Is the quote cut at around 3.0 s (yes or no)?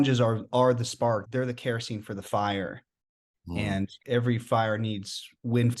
no